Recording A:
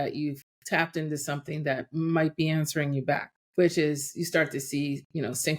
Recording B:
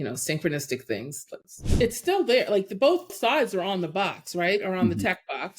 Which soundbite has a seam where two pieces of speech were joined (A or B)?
B